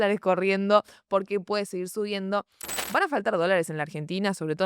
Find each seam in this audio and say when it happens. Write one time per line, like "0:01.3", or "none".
0:02.9